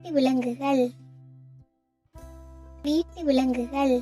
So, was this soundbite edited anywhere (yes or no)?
yes